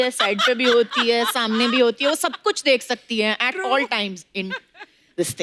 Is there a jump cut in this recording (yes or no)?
no